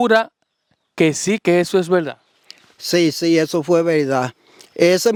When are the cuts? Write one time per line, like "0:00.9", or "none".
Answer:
none